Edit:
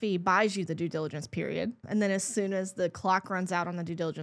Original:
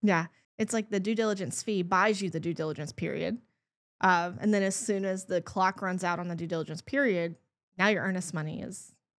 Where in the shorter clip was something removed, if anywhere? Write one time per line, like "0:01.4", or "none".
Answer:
0:01.8